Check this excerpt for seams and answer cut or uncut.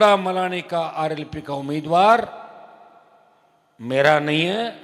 uncut